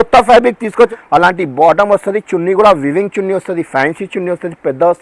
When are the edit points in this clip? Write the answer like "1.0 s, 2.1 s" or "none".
0.9 s

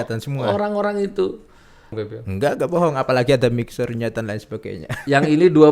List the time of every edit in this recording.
1.9 s

